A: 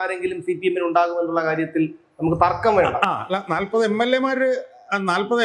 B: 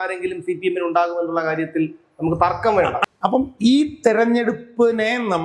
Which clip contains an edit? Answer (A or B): B